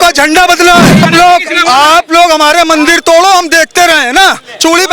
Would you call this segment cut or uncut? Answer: cut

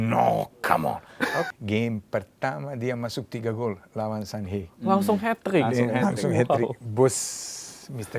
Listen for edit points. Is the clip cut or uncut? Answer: cut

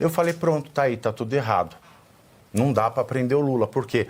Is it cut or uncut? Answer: uncut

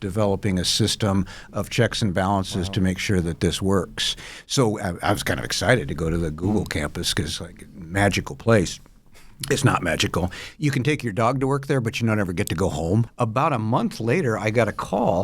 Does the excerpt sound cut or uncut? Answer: cut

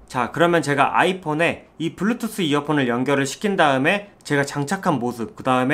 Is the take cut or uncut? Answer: uncut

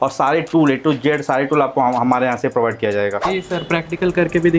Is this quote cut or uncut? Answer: cut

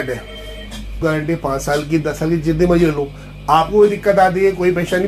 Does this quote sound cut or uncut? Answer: cut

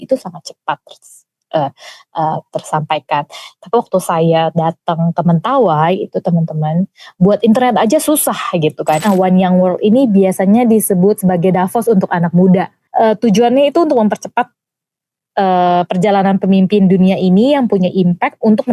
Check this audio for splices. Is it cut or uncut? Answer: cut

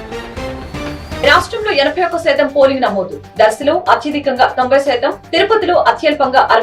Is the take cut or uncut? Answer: cut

